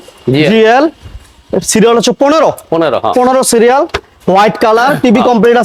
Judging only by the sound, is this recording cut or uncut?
uncut